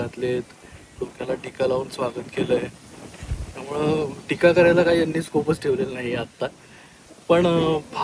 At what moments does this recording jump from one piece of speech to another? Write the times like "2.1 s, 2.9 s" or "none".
none